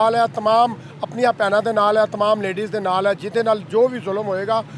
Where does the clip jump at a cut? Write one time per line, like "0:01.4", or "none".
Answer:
none